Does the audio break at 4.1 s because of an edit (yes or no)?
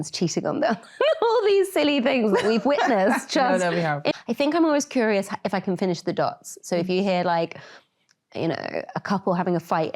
yes